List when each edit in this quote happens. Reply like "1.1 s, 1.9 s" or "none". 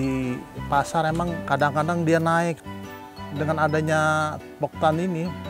1.4 s, 3.1 s